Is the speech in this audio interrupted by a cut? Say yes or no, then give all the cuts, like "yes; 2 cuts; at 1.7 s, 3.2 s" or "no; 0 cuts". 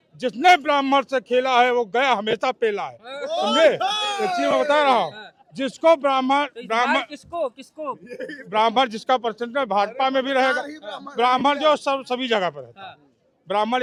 no; 0 cuts